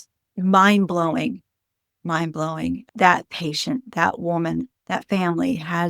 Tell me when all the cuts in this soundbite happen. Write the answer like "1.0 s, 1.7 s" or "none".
2.8 s